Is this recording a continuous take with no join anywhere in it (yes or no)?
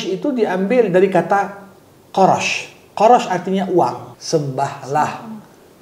no